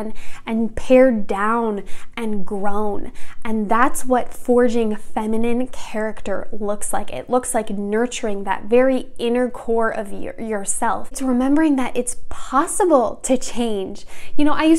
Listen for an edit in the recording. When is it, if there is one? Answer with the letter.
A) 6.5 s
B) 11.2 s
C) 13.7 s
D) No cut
B